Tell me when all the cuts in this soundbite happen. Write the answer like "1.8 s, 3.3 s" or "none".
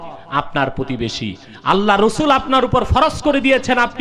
none

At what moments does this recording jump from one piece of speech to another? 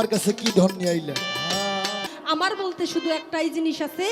2.1 s

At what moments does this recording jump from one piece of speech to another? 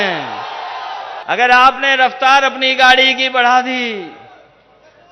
1.1 s

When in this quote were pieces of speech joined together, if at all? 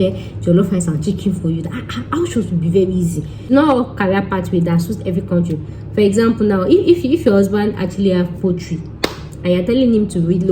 3.5 s

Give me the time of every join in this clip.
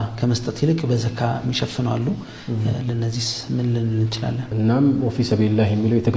4.5 s

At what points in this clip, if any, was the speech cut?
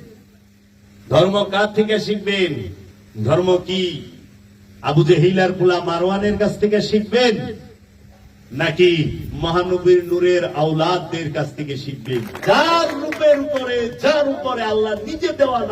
12.3 s

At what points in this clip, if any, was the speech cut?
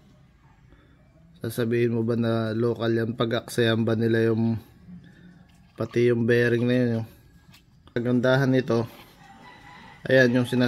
7.9 s

